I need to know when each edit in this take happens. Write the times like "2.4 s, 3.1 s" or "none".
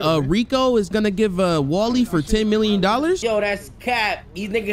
3.2 s